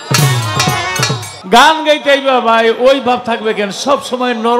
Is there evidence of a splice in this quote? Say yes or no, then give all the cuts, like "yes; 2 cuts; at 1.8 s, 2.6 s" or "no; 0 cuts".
yes; 1 cut; at 1.3 s